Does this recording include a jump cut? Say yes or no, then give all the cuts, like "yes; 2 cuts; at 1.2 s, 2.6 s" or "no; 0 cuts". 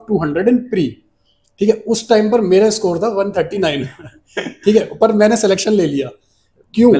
no; 0 cuts